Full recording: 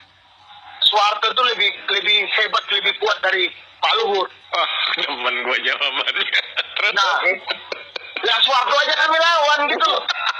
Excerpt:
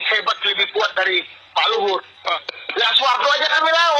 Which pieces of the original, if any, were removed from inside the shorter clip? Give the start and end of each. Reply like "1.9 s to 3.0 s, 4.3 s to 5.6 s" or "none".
4.8 s to 8.0 s